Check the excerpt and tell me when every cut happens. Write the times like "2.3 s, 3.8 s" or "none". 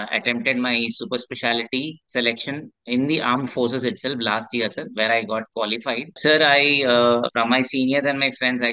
2.0 s, 6.2 s, 7.3 s